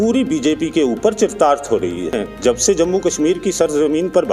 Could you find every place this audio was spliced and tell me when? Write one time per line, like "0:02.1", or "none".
0:02.1